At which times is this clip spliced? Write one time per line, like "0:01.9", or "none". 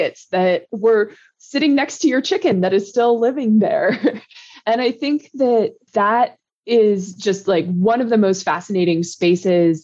none